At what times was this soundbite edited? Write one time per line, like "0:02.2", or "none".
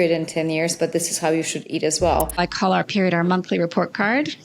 0:02.4